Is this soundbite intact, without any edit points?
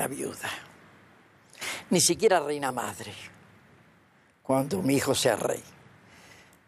no; 1 cut; at 3.3 s

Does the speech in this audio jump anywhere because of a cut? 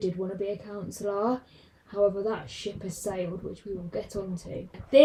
no; 0 cuts

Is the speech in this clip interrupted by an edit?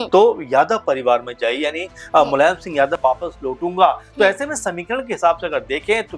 yes; 1 cut; at 3.0 s

